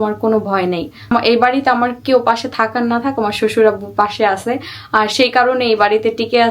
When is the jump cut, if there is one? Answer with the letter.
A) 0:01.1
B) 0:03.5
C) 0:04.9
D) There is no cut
A